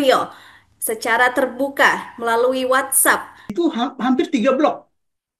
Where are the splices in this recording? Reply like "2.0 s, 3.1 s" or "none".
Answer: 3.5 s